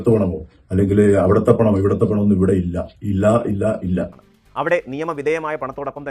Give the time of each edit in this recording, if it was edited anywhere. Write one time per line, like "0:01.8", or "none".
0:04.2